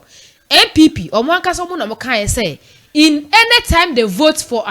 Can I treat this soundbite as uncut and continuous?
yes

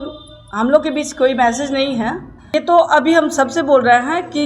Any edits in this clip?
yes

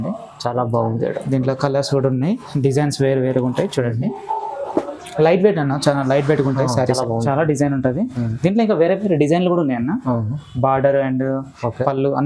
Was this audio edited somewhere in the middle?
yes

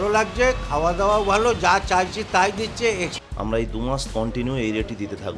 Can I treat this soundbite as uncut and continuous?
no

